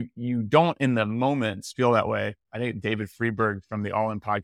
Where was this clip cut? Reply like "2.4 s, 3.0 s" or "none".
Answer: 2.4 s